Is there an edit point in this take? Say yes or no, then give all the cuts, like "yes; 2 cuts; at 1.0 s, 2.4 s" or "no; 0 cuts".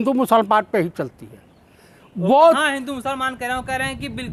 no; 0 cuts